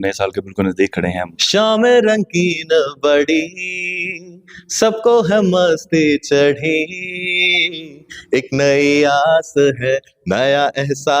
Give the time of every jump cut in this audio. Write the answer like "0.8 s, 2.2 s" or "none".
1.4 s